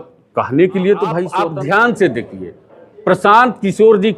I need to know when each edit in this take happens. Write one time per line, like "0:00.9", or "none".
0:01.4